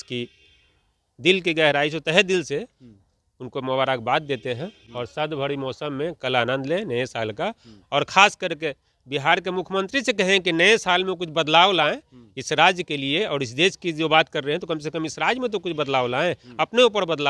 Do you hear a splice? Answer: no; 0 cuts

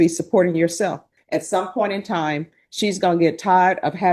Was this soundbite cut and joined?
yes; 1 cut; at 1.1 s

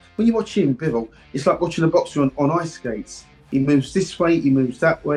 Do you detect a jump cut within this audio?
no; 0 cuts

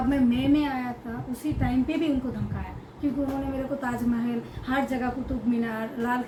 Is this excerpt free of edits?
yes; 0 cuts

